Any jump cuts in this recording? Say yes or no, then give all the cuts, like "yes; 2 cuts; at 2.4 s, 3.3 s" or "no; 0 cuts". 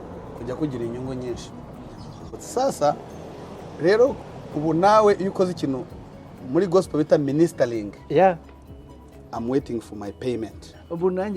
yes; 1 cut; at 2.4 s